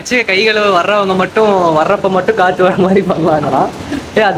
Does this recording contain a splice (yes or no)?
no